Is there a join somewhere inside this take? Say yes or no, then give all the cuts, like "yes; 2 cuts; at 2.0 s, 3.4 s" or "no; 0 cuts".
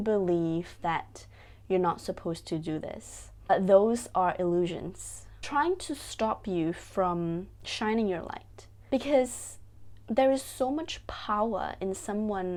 no; 0 cuts